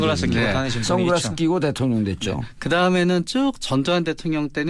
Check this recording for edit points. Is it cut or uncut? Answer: uncut